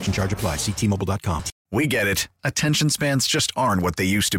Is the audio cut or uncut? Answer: cut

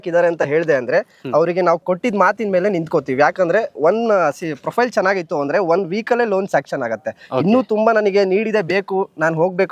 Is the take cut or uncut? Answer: uncut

